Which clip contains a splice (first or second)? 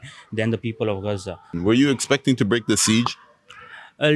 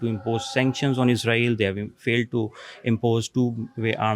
first